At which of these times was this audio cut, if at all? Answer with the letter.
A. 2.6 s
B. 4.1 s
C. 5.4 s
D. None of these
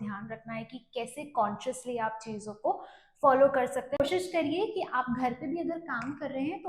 B